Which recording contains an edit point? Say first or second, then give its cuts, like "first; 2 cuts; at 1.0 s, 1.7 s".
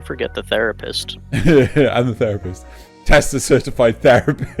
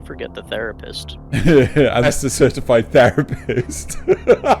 second; 1 cut; at 2.1 s